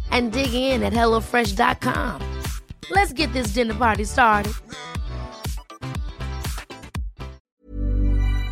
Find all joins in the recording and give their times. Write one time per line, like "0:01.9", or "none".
0:07.4